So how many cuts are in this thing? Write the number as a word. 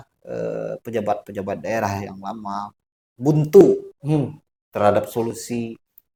zero